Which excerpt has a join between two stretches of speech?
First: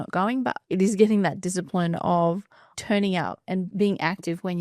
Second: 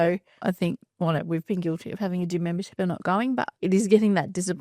first; 1 cut; at 3.7 s

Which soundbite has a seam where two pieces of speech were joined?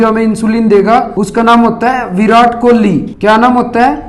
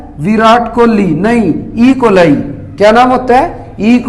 first; 2 cuts; at 1.2 s, 3.1 s

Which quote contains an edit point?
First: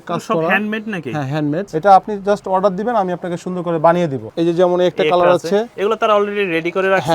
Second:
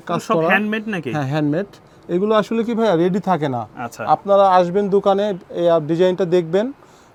first; 2 cuts; at 1.7 s, 4.2 s

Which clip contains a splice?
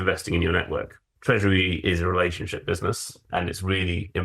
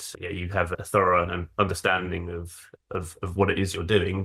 first; 1 cut; at 1.1 s

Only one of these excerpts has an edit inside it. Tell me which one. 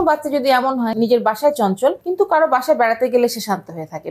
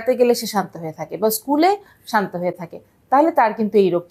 first; 2 cuts; at 0.9 s, 2.0 s

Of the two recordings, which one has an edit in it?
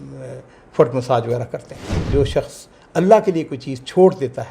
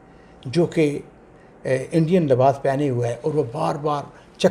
first; 1 cut; at 2.0 s

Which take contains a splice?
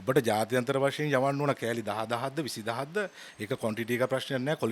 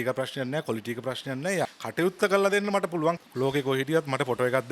second; 2 cuts; at 1.7 s, 3.2 s

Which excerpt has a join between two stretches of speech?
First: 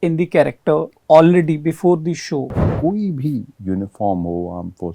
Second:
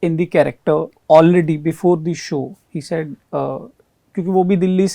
first; 1 cut; at 2.7 s

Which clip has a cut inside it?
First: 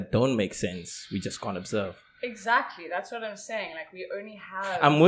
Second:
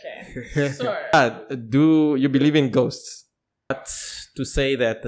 second; 2 cuts; at 1.1 s, 3.7 s

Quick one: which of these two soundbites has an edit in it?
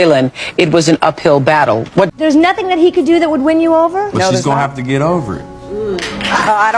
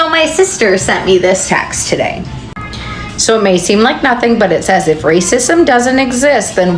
first; 1 cut; at 2.1 s

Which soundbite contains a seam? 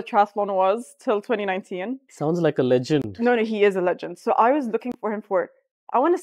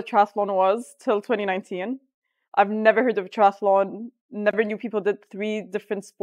first; 1 cut; at 2.1 s

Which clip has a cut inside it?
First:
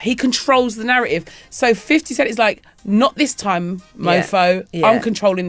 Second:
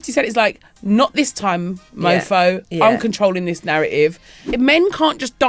second; 1 cut; at 4.4 s

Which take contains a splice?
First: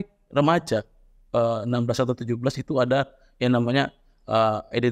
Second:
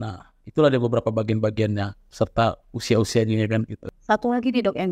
second; 1 cut; at 3.8 s

